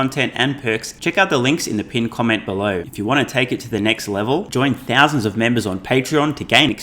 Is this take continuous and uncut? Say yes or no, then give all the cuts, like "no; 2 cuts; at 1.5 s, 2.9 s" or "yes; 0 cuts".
no; 2 cuts; at 0.9 s, 2.9 s